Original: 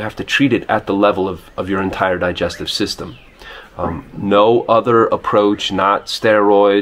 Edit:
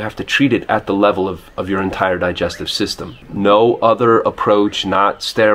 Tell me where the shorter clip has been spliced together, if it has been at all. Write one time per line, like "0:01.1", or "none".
0:03.2

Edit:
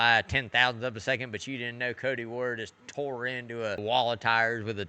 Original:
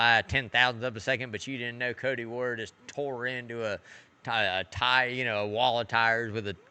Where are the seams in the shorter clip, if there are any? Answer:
0:03.8

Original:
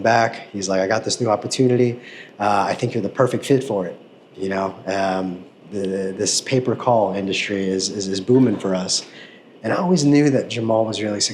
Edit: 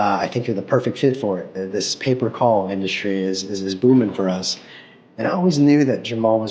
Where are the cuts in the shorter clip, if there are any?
0:01.6

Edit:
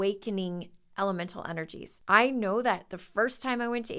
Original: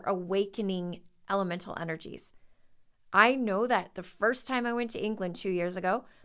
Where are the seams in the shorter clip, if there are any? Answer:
0:01.9

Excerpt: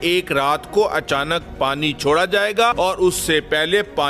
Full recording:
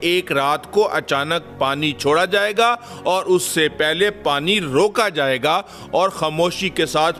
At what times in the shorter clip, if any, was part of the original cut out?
0:02.7

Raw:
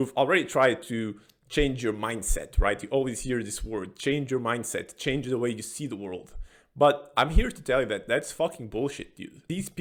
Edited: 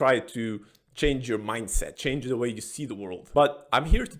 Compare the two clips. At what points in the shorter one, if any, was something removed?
0:01.9
0:03.2

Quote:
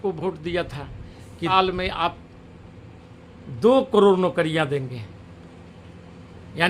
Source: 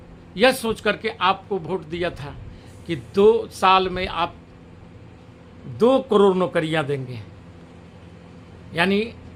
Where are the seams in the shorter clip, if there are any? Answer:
0:01.5

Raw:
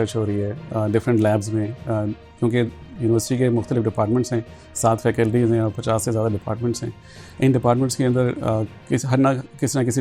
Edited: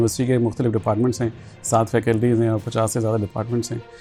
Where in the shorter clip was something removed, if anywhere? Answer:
none

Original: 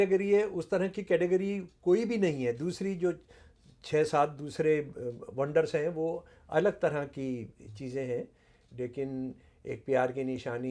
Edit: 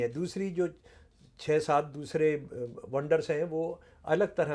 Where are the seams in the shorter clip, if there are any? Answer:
none

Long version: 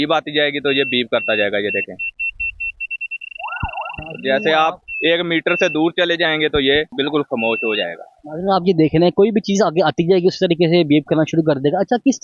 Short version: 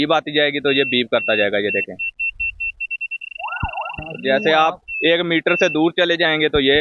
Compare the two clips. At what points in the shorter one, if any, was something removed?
none

